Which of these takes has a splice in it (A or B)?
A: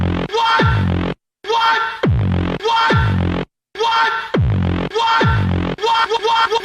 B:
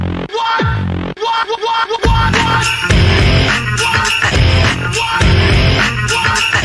A